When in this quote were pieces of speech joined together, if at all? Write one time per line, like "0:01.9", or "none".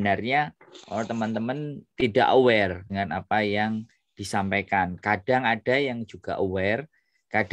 0:01.8
0:02.8